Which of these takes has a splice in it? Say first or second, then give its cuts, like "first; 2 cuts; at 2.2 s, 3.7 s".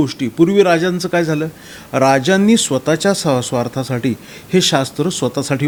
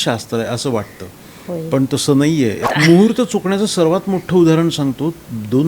second; 1 cut; at 2.6 s